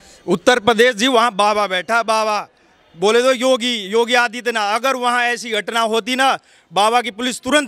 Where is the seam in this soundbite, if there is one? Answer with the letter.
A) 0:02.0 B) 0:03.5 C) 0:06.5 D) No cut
D